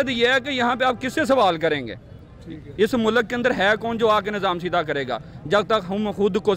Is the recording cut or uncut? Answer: uncut